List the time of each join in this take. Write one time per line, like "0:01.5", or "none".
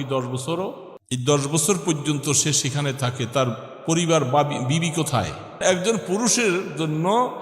0:00.9
0:05.6